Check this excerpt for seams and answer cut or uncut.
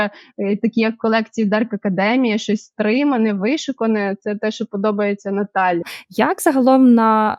cut